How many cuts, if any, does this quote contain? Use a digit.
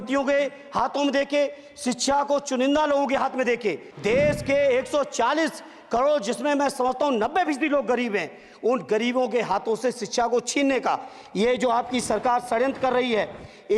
1